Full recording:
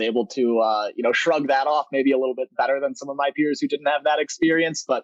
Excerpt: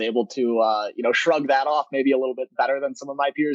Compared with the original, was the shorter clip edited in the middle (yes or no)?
no